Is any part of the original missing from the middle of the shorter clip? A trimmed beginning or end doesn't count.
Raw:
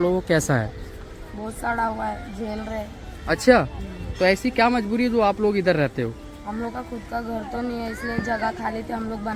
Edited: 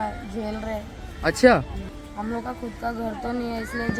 yes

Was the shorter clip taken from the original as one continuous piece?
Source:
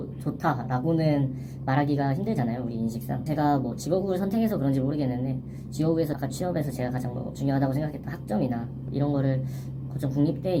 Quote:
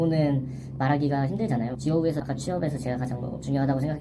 no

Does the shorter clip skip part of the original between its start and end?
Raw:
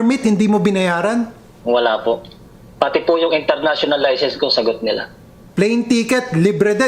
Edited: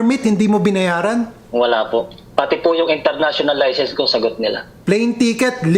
yes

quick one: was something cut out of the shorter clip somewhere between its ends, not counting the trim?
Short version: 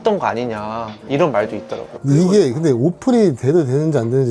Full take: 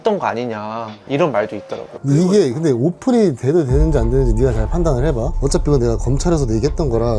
no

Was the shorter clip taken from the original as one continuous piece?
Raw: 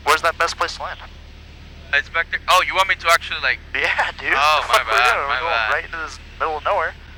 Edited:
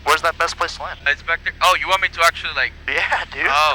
no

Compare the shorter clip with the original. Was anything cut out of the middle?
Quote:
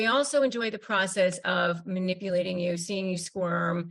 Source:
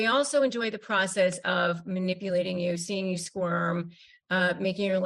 no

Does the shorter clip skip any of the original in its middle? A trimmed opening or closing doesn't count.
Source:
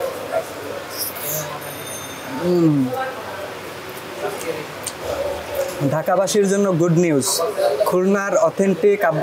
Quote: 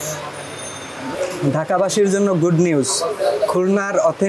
yes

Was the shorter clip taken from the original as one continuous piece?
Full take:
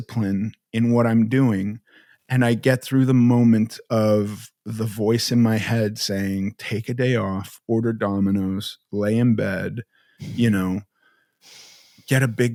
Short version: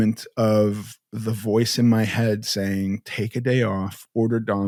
yes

